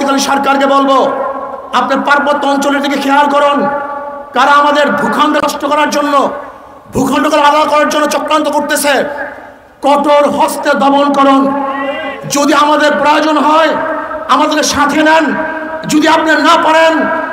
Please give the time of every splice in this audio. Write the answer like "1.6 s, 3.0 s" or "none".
5.4 s

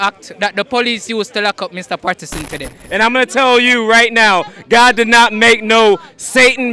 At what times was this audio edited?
2.8 s

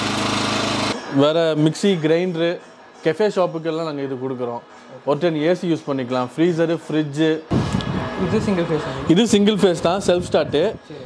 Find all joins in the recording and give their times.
0.9 s, 7.5 s

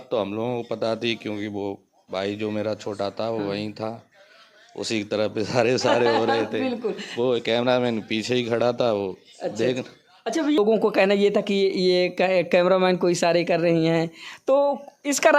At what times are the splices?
10.6 s

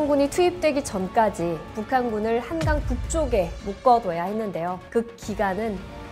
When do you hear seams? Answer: 1.7 s, 4.8 s

